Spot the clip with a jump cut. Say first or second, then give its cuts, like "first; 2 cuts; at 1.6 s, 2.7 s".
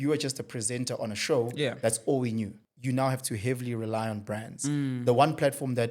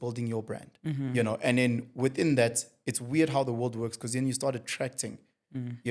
first; 1 cut; at 2.6 s